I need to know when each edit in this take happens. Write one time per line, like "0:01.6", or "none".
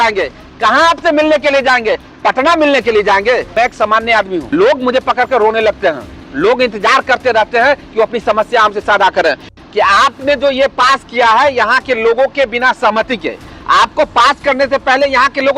0:03.5
0:04.5
0:09.5